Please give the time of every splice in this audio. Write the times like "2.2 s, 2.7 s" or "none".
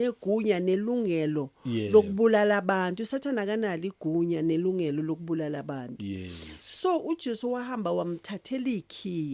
none